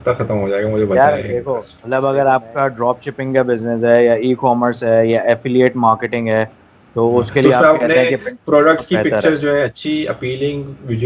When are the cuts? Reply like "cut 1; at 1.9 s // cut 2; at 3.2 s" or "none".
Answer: cut 1; at 1.7 s